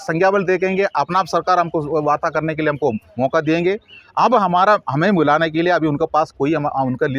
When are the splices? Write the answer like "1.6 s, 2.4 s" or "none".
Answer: none